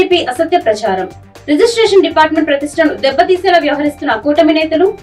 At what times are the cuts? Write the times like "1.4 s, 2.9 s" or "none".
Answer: none

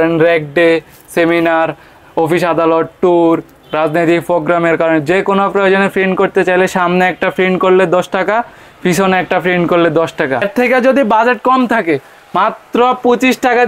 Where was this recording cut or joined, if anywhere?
10.5 s

